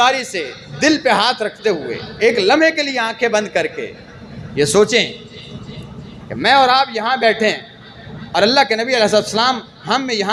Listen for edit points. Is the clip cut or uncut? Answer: uncut